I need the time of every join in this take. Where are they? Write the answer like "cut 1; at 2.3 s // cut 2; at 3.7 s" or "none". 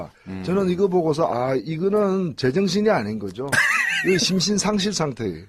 cut 1; at 1.4 s